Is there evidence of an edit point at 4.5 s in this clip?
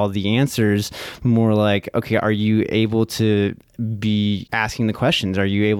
yes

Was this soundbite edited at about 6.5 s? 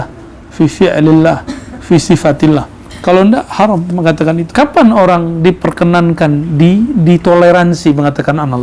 no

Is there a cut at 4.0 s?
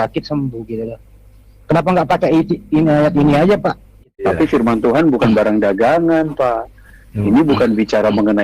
yes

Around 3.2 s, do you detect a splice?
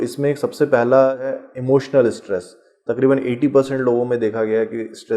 no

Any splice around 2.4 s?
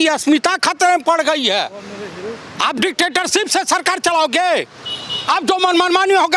no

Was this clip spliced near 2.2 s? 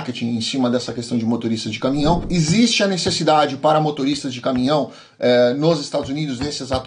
yes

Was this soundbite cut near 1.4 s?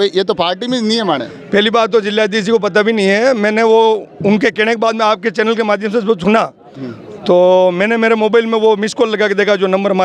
no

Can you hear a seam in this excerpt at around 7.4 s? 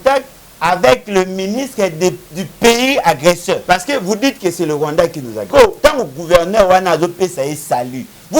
no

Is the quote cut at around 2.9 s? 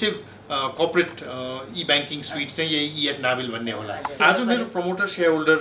no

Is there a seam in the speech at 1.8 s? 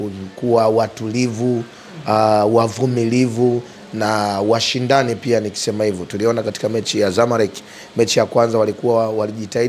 no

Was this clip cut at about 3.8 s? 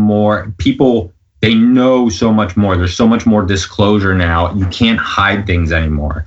no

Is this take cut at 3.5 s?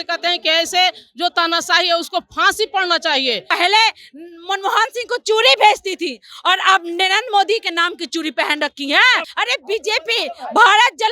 yes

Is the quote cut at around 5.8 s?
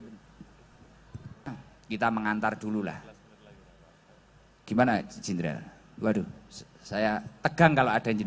no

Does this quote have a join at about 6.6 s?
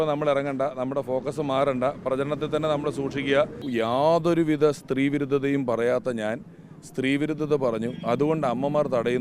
no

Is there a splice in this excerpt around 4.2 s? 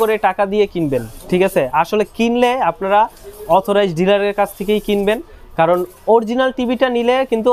no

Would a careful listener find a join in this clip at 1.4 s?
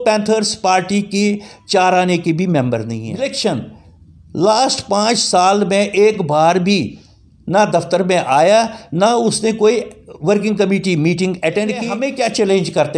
no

